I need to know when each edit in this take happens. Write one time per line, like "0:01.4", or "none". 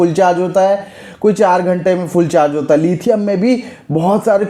none